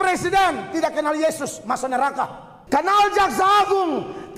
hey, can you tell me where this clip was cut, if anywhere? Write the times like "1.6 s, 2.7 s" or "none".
2.5 s